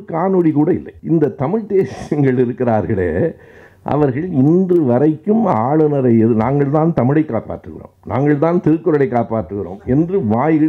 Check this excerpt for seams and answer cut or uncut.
cut